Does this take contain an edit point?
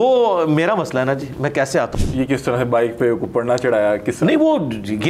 yes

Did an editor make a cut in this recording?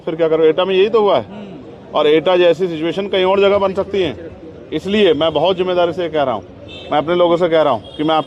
no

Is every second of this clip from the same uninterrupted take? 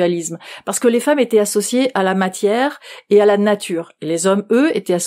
yes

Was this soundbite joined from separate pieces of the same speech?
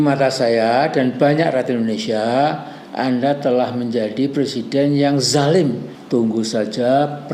yes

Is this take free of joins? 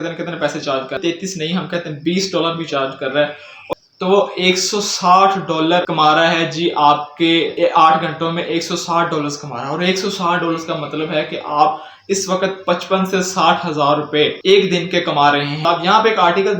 no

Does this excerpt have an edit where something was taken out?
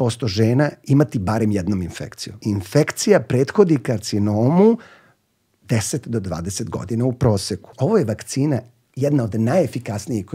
yes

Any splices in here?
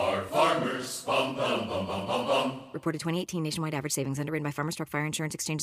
no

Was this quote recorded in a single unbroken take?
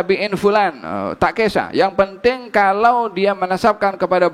yes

